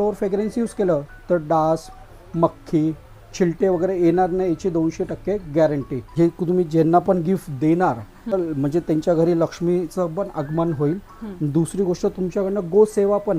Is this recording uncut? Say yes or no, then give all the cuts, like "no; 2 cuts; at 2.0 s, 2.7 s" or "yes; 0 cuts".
no; 2 cuts; at 6.0 s, 8.3 s